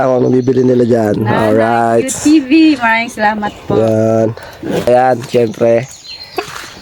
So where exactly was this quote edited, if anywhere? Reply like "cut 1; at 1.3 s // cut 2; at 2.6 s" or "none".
cut 1; at 4.9 s